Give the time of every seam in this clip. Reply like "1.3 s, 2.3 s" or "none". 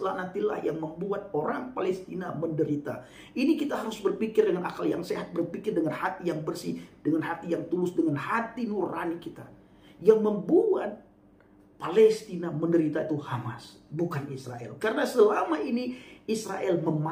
none